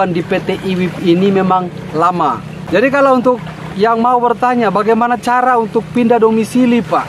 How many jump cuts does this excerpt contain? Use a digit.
1